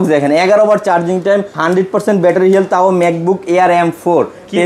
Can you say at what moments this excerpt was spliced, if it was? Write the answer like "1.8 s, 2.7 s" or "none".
1.5 s